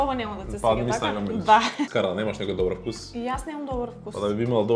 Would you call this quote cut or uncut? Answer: cut